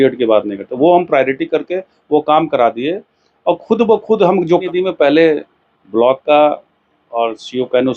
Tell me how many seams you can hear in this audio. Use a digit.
1